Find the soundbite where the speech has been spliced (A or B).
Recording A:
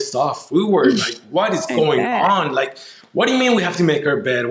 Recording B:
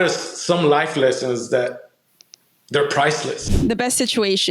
B